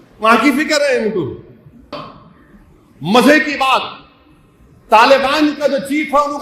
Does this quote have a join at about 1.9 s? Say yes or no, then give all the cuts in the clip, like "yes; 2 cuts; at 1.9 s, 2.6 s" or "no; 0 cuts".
yes; 1 cut; at 1.9 s